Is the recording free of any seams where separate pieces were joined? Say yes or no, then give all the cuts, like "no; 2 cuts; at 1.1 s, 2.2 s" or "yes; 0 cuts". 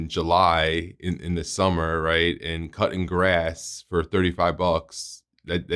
yes; 0 cuts